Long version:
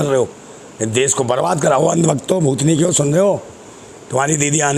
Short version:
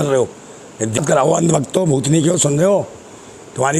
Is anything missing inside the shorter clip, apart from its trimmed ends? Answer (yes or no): yes